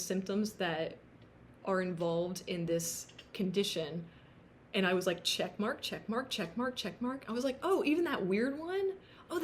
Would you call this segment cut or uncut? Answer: uncut